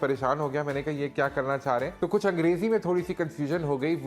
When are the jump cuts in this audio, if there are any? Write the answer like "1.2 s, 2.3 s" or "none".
1.9 s